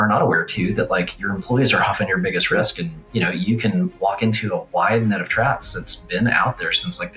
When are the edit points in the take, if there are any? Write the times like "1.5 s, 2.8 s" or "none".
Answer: none